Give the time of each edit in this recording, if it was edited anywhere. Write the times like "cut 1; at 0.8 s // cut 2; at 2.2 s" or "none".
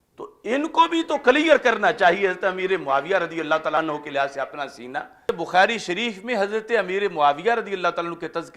cut 1; at 3.8 s // cut 2; at 5.3 s